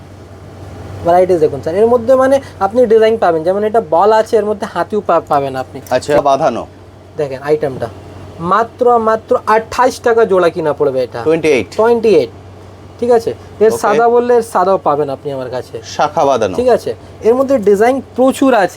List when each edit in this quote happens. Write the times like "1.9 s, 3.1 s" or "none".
6.2 s